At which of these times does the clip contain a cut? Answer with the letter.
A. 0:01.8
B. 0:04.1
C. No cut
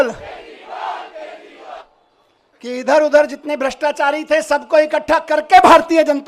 A